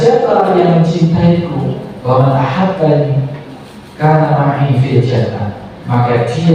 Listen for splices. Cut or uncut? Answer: uncut